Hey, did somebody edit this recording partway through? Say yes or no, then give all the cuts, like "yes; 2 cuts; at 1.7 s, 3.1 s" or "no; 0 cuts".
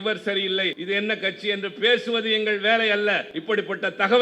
yes; 2 cuts; at 0.8 s, 3.3 s